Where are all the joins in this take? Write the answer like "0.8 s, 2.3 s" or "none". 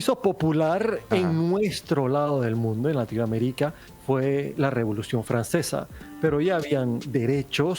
3.9 s, 6.0 s

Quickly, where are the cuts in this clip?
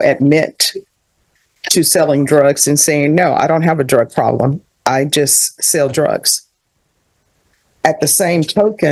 none

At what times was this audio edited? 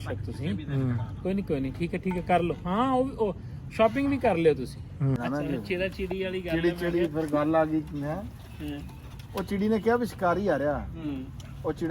5.2 s

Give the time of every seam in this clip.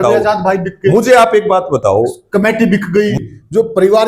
3.2 s

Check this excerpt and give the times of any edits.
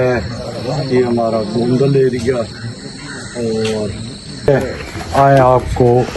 4.5 s

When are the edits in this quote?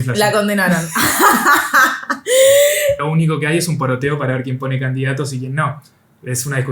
3.0 s

